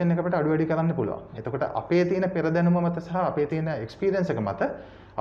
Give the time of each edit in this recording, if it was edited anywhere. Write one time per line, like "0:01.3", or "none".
none